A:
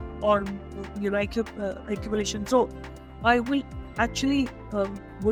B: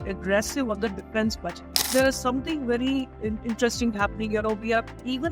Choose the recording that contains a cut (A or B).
B